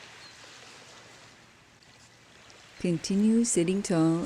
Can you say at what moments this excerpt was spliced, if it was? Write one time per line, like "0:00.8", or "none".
0:02.8